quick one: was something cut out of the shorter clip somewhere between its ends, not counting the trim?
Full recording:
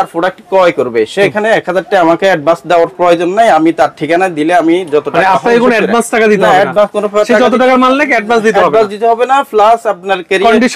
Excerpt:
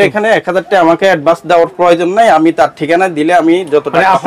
no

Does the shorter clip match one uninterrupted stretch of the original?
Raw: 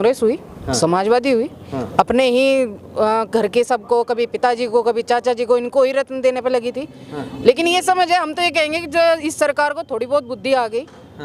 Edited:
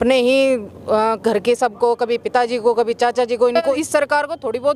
no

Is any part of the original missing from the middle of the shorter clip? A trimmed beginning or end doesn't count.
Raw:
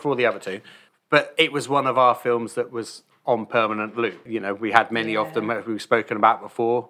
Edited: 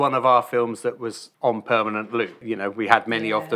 yes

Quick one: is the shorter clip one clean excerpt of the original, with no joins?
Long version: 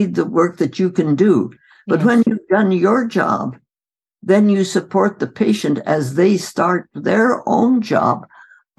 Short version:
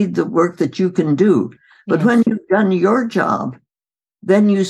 yes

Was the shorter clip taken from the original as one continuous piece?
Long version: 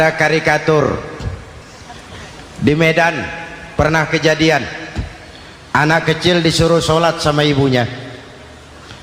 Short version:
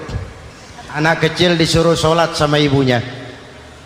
no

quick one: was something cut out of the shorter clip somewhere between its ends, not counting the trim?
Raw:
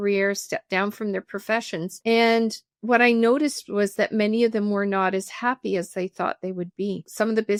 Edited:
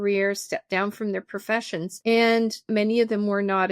yes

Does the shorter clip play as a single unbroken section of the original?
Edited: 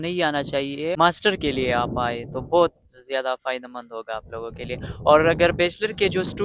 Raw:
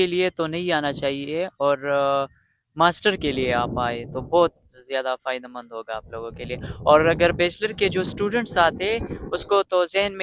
no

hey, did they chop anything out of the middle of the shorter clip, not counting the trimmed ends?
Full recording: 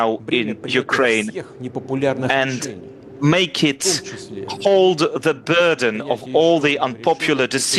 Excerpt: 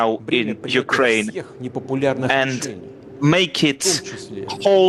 no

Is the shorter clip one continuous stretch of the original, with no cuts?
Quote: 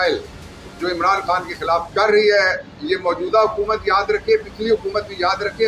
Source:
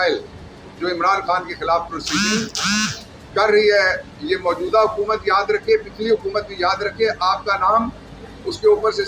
no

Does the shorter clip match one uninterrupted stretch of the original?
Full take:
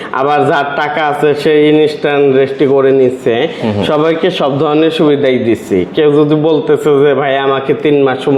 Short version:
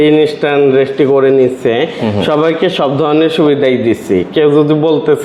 yes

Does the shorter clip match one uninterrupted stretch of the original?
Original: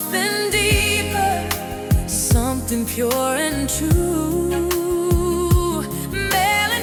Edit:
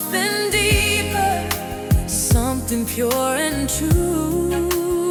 yes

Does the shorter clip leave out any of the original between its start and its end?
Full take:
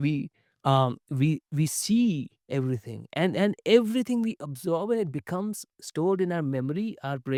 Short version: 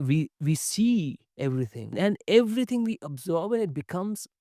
yes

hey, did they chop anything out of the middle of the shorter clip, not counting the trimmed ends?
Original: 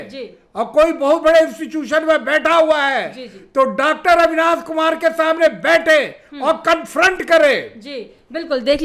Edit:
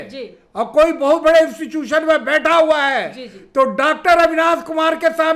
no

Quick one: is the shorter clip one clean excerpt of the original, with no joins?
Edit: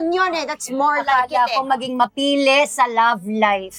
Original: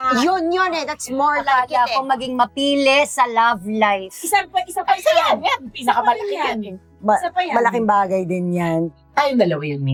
yes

